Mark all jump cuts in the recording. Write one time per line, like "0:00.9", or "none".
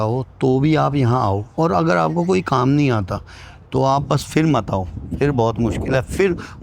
none